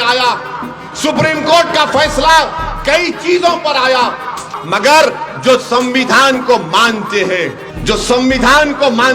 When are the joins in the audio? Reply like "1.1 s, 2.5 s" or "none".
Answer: 4.5 s, 7.7 s